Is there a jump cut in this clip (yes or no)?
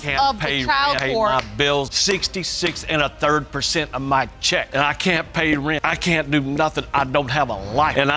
no